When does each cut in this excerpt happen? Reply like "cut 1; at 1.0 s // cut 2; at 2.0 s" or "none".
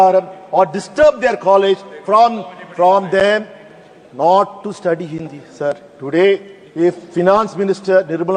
none